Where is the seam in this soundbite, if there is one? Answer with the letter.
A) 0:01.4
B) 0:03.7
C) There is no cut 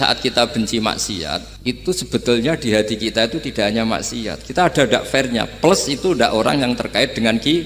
A